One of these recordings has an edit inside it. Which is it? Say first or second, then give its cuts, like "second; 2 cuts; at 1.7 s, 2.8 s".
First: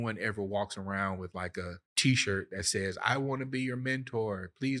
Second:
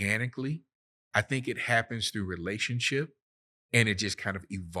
first; 1 cut; at 1.8 s